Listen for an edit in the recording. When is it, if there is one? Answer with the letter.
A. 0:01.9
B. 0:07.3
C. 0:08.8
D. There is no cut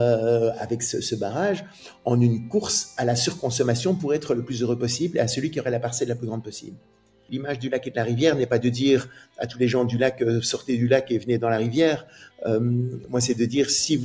B